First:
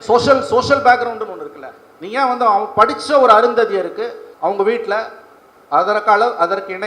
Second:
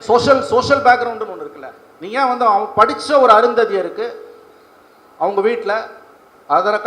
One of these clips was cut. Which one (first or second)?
first